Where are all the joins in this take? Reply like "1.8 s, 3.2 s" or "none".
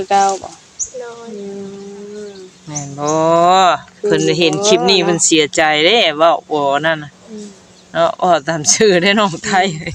none